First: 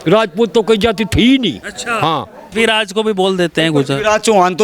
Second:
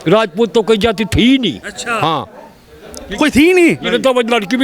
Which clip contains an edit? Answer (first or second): first